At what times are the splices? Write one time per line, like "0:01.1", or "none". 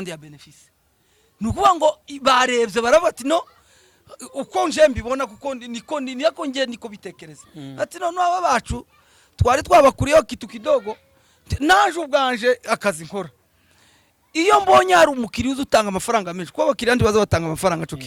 none